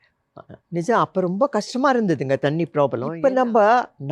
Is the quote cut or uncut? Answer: cut